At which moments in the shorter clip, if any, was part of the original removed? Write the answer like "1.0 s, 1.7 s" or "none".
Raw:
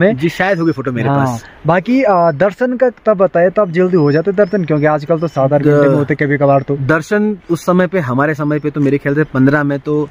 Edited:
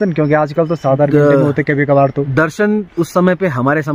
none